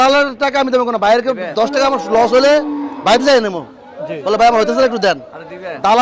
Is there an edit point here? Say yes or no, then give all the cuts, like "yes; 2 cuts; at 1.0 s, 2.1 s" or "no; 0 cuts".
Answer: no; 0 cuts